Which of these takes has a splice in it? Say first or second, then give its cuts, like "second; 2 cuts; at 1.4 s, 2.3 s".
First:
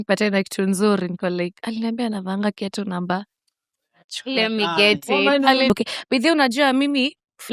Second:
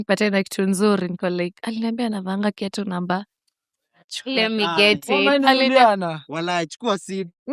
first; 1 cut; at 5.7 s